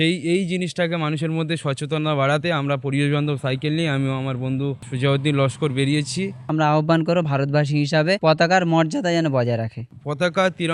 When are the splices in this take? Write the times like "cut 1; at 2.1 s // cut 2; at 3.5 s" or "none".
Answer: cut 1; at 4.9 s // cut 2; at 6.4 s // cut 3; at 8.2 s // cut 4; at 9.8 s